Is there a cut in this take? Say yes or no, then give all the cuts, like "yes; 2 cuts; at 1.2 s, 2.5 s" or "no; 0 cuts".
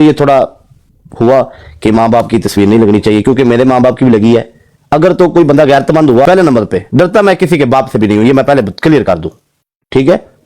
yes; 1 cut; at 6.2 s